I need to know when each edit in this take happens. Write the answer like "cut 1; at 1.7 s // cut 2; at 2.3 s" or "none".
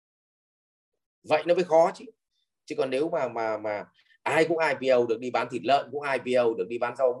none